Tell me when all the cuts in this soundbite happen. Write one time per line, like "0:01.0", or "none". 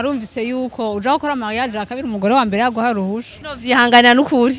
0:03.5

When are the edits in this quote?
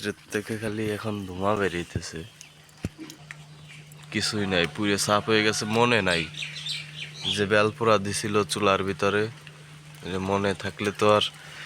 0:03.2

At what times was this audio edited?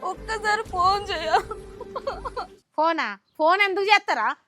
0:02.5

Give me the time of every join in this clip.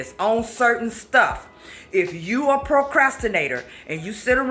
none

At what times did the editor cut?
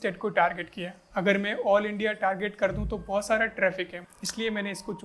0:04.0

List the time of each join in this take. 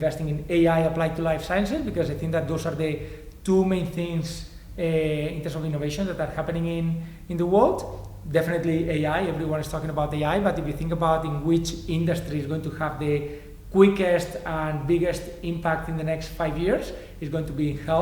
none

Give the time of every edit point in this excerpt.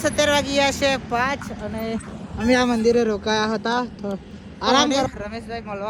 none

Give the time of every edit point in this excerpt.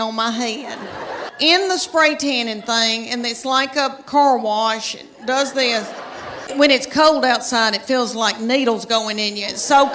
0:01.3
0:06.5

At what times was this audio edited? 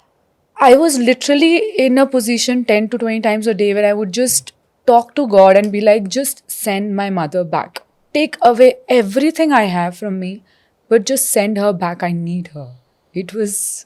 none

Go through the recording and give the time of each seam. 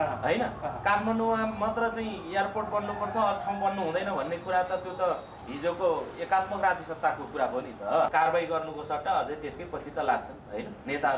0:08.1

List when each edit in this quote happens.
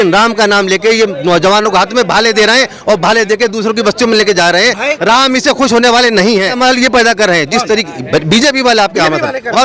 0:06.6

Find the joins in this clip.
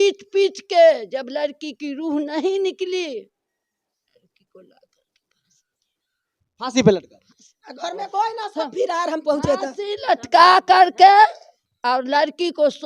none

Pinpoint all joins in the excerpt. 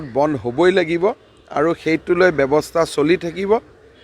none

